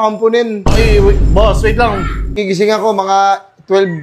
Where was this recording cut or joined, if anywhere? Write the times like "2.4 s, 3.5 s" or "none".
2.4 s